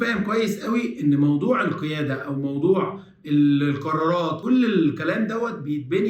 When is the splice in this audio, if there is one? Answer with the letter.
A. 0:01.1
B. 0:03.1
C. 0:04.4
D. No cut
C